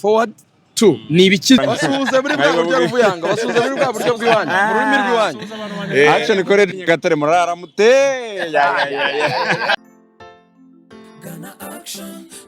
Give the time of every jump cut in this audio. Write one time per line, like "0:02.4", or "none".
0:01.6
0:09.7